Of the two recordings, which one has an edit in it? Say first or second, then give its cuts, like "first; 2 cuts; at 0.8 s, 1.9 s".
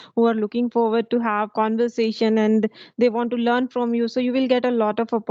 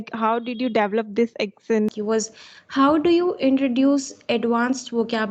second; 1 cut; at 2.0 s